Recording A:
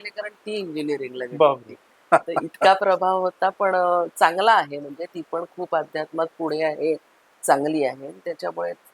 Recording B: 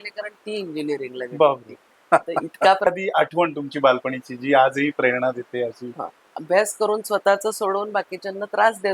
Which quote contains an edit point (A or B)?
B